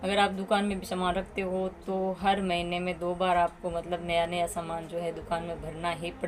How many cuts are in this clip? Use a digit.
0